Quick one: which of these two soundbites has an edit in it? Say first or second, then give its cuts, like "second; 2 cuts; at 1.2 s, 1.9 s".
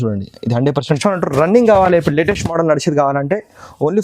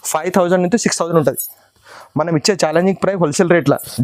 first; 1 cut; at 1.0 s